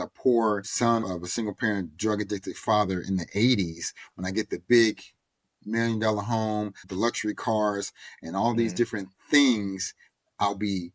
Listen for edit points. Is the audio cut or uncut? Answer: cut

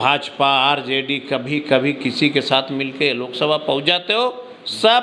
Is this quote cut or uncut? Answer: uncut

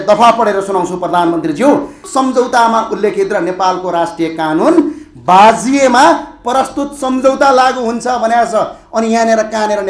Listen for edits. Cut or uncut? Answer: cut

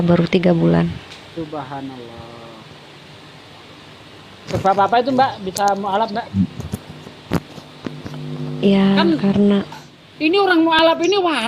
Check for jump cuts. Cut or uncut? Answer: cut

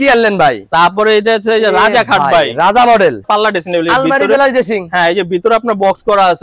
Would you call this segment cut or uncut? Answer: cut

